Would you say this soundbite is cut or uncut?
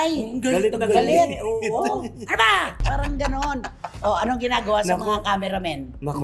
uncut